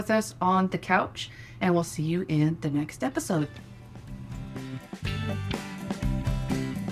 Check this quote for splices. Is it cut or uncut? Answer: uncut